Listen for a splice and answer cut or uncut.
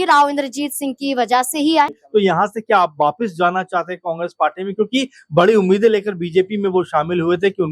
cut